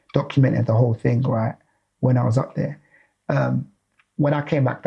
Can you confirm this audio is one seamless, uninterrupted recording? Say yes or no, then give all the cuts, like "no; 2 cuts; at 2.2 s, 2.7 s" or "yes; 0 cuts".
yes; 0 cuts